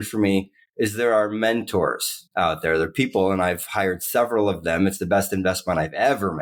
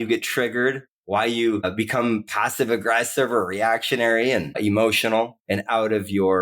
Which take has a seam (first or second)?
second